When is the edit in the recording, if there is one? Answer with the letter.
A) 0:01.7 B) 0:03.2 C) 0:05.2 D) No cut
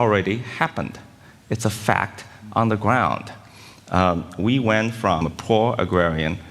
C